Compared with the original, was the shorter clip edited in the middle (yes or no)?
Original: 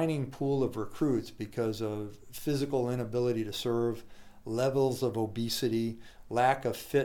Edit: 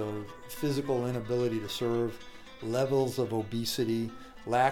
no